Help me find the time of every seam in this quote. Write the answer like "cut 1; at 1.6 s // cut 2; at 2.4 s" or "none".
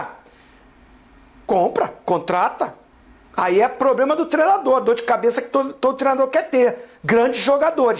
none